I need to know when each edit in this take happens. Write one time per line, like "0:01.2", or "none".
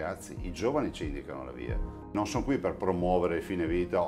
0:02.1